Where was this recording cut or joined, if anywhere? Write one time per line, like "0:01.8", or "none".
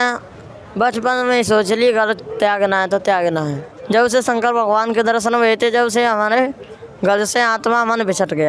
0:03.7